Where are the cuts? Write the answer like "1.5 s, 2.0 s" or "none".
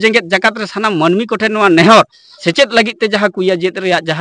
2.3 s